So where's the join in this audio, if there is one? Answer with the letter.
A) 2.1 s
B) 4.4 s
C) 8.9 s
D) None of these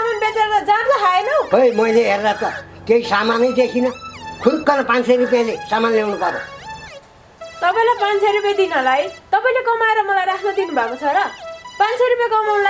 D